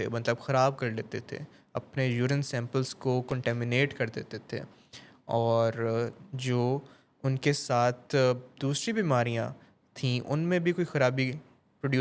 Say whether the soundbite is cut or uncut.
uncut